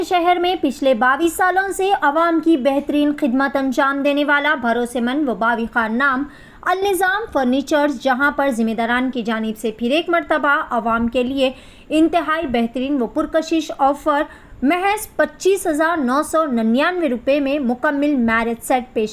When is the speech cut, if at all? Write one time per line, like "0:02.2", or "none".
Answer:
none